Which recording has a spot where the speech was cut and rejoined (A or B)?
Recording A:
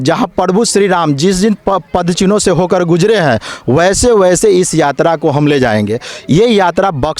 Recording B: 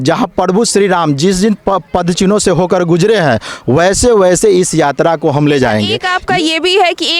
B